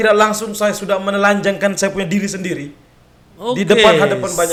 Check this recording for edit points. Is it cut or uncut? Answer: uncut